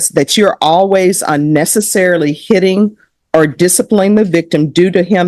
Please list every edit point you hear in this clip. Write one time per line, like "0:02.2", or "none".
none

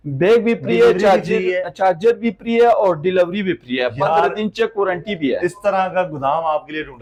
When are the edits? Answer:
none

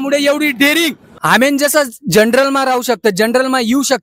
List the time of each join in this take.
0:01.1

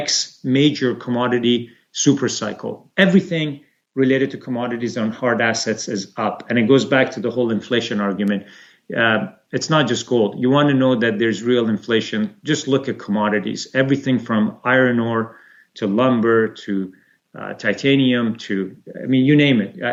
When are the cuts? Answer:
none

